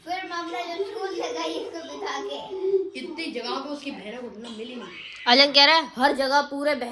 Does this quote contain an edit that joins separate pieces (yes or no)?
no